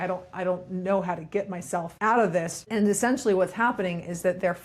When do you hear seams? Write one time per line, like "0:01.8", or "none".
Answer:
0:01.9
0:02.7